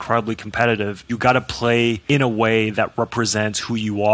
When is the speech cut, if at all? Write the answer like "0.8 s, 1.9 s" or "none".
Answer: 1.0 s, 2.0 s